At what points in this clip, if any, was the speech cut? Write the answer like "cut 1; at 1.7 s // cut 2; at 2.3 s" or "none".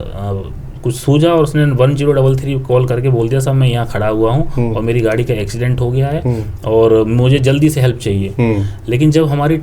none